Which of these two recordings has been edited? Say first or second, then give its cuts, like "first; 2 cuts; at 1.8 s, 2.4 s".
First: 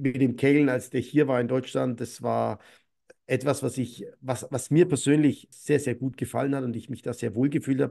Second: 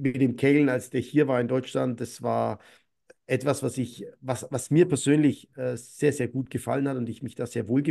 first; 1 cut; at 5.5 s